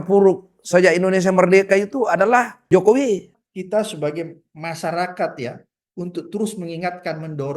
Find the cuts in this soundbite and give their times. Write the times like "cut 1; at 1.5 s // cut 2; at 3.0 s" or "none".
cut 1; at 2.6 s // cut 2; at 3.3 s